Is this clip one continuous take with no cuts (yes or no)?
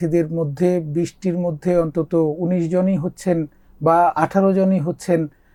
yes